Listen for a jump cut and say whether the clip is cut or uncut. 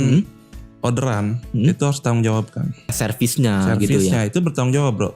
cut